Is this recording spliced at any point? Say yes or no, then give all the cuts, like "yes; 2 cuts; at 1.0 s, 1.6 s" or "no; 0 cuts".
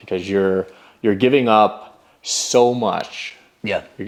no; 0 cuts